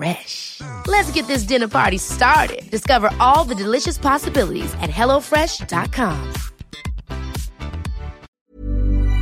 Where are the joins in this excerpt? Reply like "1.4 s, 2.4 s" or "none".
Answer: 8.3 s